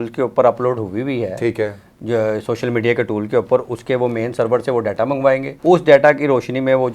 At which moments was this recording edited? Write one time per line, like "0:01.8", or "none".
0:05.5